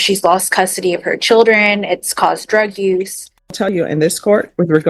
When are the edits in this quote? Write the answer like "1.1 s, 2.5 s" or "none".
3.7 s